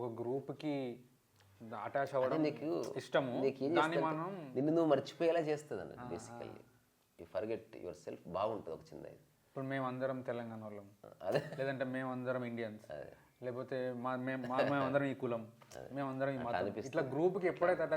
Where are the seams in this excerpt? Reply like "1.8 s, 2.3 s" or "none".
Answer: none